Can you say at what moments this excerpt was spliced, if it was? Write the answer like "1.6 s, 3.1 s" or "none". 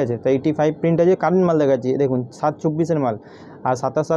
none